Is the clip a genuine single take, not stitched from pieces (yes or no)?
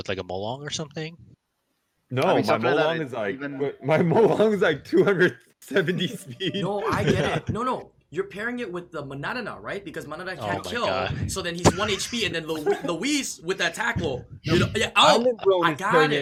yes